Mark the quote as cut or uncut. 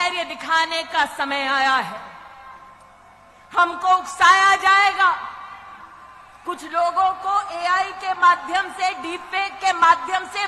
uncut